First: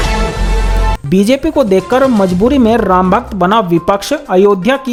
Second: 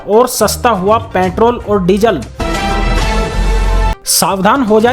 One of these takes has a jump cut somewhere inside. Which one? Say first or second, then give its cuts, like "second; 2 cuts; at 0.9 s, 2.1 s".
second; 2 cuts; at 2.3 s, 4.0 s